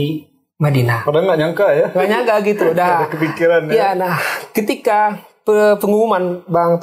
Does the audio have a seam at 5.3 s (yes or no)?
no